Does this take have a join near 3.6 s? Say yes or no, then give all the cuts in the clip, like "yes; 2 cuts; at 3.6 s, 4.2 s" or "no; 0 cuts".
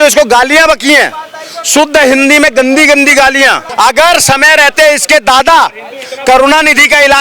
yes; 1 cut; at 3.6 s